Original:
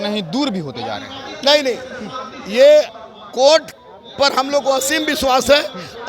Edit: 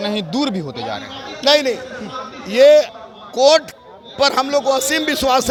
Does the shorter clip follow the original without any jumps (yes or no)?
yes